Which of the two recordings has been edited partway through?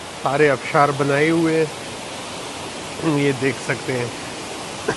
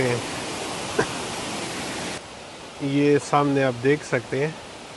second; 1 cut; at 2.2 s

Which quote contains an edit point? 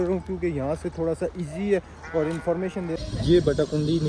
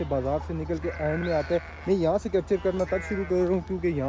first; 1 cut; at 3.0 s

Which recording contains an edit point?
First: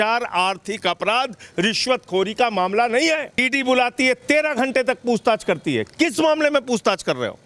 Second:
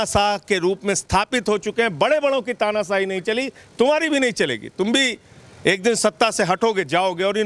first; 1 cut; at 3.4 s

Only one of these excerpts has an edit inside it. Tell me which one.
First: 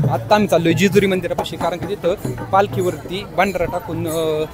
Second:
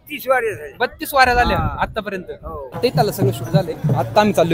second; 1 cut; at 2.7 s

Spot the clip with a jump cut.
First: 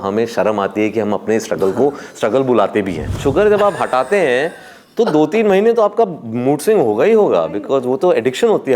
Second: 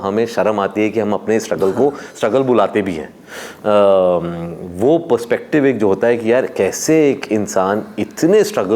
first; 1 cut; at 3.2 s

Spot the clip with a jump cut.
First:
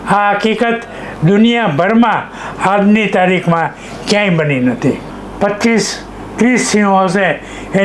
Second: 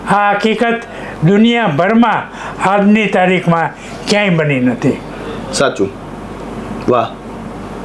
first; 1 cut; at 5.2 s

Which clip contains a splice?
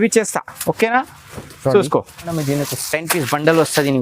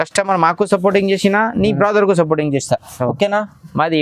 first; 1 cut; at 2.3 s

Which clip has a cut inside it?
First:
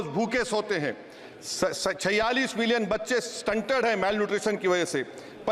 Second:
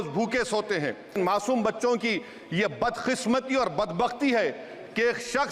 second; 1 cut; at 1.2 s

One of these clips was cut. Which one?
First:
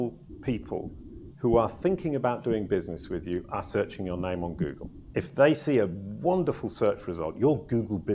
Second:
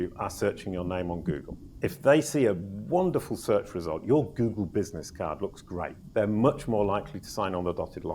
second; 1 cut; at 6.0 s

